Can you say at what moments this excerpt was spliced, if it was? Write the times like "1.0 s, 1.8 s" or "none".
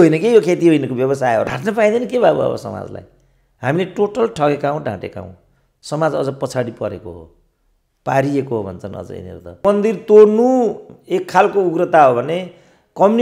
1.4 s, 9.6 s